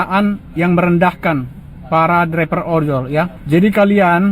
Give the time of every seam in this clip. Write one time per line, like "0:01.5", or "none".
0:03.4